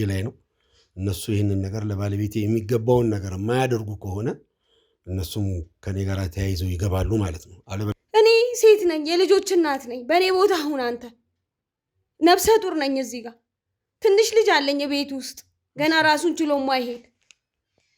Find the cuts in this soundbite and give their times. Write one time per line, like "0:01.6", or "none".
0:08.0